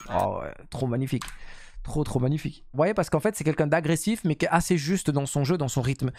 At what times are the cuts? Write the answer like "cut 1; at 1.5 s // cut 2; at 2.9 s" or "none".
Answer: cut 1; at 2.7 s

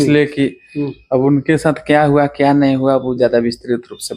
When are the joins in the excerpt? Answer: none

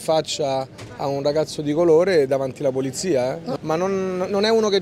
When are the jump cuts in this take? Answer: cut 1; at 3.5 s

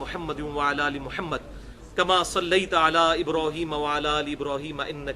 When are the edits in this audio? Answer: cut 1; at 3.6 s

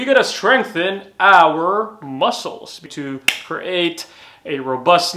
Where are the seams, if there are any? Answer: none

